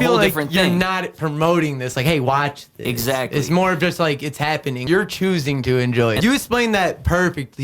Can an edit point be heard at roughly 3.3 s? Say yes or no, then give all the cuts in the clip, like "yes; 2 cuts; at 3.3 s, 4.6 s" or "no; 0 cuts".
no; 2 cuts; at 4.8 s, 6.2 s